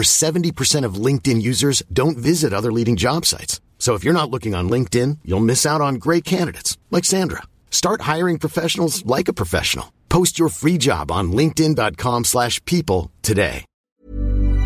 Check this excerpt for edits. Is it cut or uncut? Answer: cut